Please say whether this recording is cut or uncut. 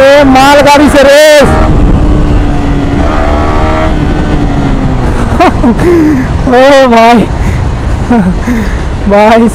uncut